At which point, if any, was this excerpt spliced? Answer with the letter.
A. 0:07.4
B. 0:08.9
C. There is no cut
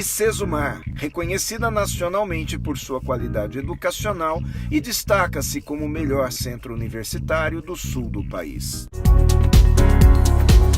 B